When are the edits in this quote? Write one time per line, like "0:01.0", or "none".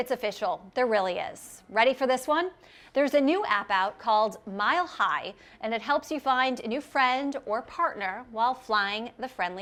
none